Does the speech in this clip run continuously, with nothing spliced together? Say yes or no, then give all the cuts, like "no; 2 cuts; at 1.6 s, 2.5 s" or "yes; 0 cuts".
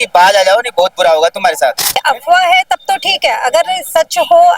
no; 1 cut; at 1.9 s